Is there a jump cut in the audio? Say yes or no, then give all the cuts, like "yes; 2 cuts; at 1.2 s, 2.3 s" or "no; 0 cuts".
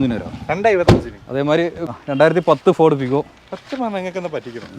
yes; 1 cut; at 1.8 s